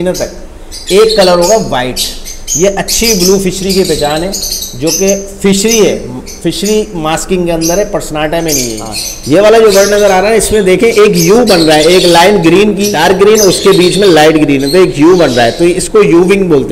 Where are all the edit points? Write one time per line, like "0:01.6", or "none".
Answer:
0:09.2
0:12.9